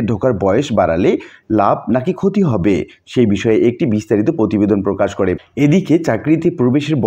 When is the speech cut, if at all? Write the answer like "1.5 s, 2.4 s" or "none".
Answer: 5.4 s